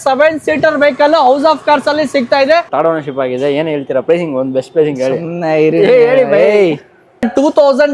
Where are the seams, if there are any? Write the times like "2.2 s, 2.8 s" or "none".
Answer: 2.7 s, 7.0 s